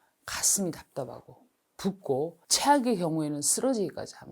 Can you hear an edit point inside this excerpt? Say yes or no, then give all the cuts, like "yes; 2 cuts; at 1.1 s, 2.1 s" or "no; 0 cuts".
yes; 1 cut; at 2.4 s